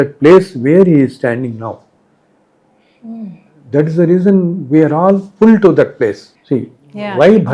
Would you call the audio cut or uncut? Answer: cut